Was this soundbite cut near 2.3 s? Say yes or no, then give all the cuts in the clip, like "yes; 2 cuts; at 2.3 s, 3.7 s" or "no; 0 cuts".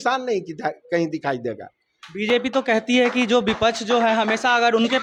no; 0 cuts